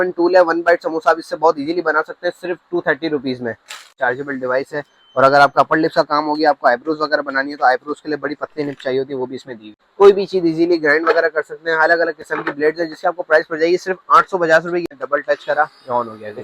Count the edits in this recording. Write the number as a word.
three